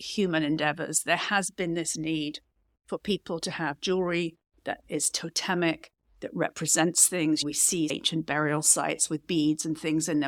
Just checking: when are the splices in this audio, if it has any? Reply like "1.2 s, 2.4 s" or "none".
none